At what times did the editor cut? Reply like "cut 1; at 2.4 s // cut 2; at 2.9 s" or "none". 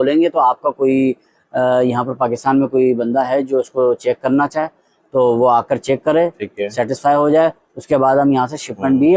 none

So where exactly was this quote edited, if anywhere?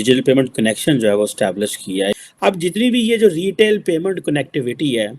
cut 1; at 2.2 s

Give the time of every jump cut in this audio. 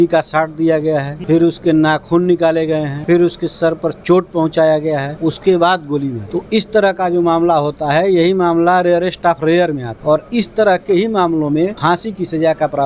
cut 1; at 1.1 s // cut 2; at 2.9 s // cut 3; at 5.1 s // cut 4; at 6.2 s // cut 5; at 9.9 s // cut 6; at 11.8 s

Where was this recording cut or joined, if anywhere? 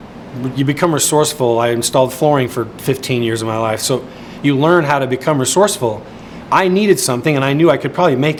none

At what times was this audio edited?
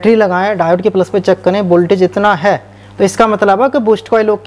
none

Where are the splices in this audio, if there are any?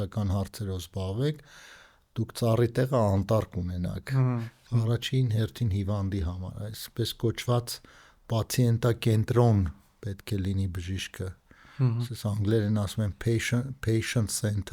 cut 1; at 4.6 s

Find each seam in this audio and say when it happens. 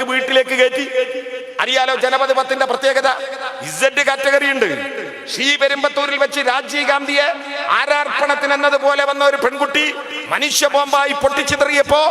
none

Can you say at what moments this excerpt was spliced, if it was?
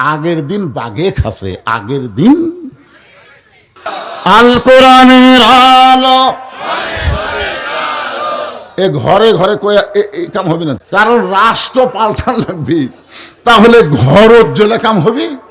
cut 1; at 4.0 s

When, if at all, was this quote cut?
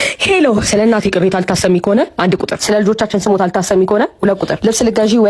none

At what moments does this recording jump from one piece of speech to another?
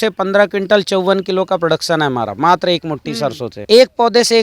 cut 1; at 3.5 s

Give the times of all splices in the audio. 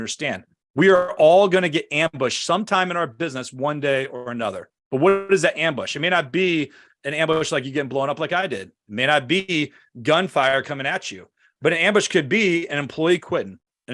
none

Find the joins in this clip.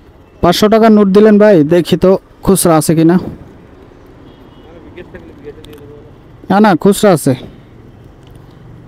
none

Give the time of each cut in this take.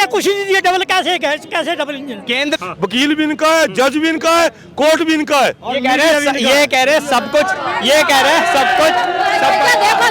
cut 1; at 2.6 s

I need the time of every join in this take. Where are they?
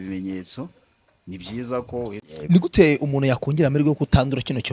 cut 1; at 2.3 s

